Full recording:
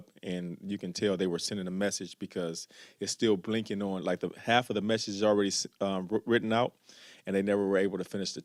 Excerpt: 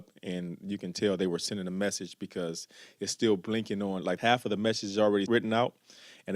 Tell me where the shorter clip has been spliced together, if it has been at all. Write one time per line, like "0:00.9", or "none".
0:04.2
0:05.3